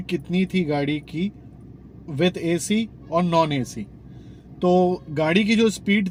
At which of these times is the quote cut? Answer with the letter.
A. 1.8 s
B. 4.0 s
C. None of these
C